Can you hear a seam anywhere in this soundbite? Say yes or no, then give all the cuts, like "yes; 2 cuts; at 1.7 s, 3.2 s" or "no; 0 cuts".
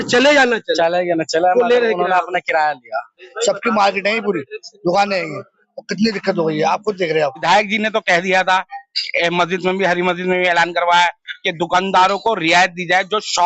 yes; 2 cuts; at 3.3 s, 7.4 s